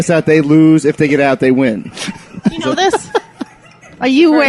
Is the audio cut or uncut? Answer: uncut